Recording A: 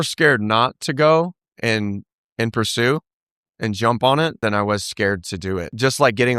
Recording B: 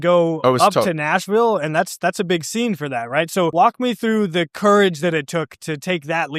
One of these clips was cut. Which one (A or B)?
A